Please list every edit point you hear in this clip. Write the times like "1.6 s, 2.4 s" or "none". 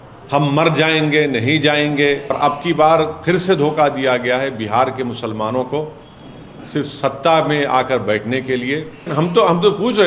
2.3 s, 9.1 s